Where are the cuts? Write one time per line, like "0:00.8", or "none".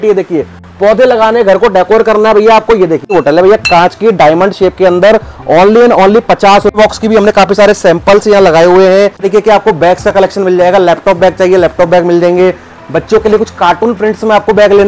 0:03.0
0:06.7
0:09.2